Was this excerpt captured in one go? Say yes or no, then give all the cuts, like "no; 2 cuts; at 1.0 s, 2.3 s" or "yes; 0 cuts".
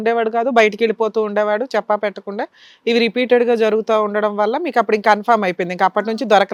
yes; 0 cuts